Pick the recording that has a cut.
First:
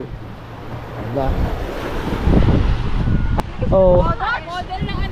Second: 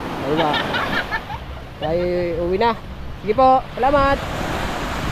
first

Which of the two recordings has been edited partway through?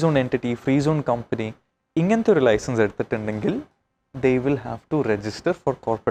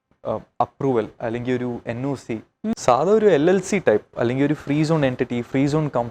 second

